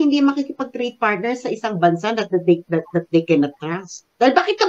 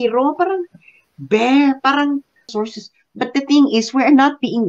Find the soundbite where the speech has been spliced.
second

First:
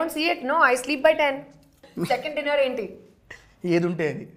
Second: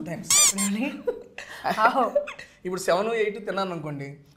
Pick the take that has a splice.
first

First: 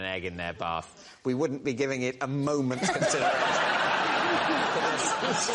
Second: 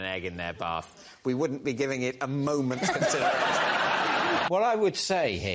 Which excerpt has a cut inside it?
second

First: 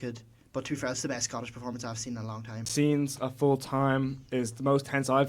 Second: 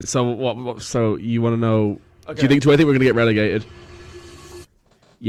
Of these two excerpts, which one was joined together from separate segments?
first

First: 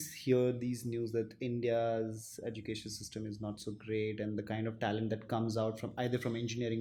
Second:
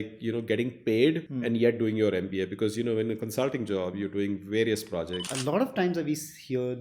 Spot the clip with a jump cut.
second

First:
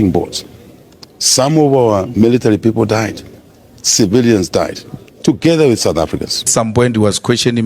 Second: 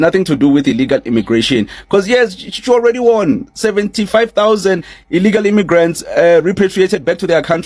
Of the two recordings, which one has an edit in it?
first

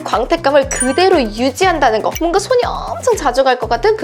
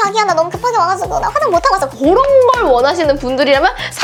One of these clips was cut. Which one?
first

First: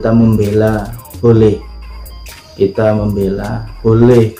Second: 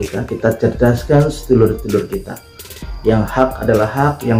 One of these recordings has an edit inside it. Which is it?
first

